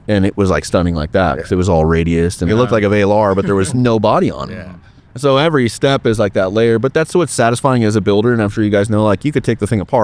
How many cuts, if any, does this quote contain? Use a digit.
2